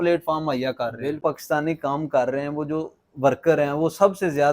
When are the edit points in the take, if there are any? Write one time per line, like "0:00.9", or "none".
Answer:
0:01.2